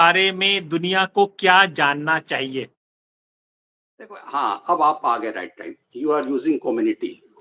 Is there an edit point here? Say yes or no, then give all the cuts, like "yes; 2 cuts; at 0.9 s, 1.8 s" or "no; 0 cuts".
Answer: no; 0 cuts